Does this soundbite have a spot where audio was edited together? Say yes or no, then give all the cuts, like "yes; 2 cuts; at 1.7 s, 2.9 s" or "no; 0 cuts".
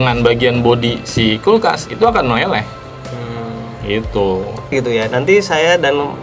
yes; 1 cut; at 4.7 s